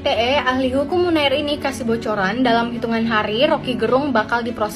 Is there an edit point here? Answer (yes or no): no